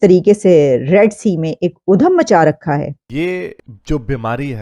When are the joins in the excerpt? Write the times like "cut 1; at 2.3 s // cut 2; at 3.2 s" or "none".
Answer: cut 1; at 3.2 s

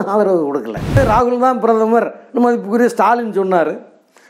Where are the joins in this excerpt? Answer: cut 1; at 1.0 s

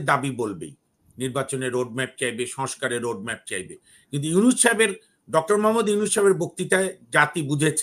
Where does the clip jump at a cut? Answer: none

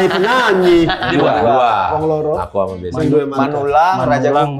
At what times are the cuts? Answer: cut 1; at 1.1 s

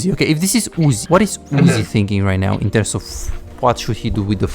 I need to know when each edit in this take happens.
cut 1; at 1.0 s

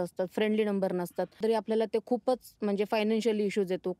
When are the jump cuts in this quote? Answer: cut 1; at 1.3 s

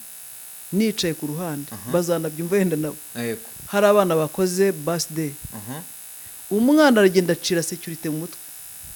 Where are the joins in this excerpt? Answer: none

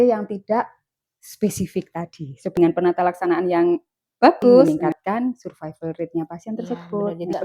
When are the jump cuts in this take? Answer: cut 1; at 2.5 s // cut 2; at 4.7 s

